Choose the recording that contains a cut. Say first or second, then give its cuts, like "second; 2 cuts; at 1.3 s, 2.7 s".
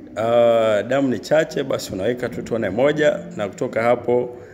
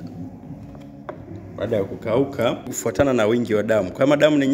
second; 1 cut; at 2.7 s